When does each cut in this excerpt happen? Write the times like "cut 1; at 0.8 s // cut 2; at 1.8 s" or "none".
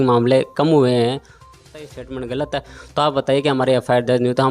cut 1; at 1.6 s